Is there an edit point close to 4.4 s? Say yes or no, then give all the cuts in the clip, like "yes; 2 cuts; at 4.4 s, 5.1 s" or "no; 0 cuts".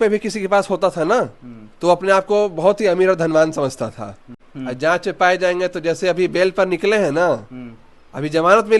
yes; 1 cut; at 4.4 s